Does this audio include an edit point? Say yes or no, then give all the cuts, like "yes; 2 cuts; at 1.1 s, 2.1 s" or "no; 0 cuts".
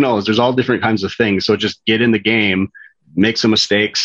no; 0 cuts